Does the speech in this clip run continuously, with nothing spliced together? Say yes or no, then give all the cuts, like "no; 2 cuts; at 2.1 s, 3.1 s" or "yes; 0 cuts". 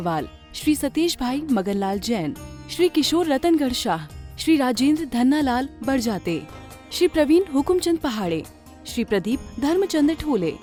yes; 0 cuts